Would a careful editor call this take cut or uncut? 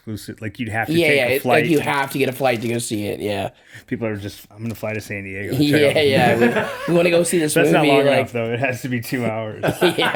uncut